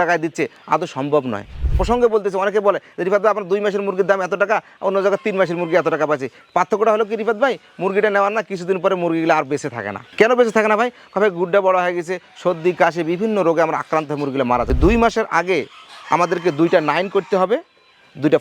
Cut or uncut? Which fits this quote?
cut